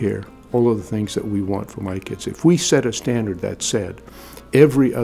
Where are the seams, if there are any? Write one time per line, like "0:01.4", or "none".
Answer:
none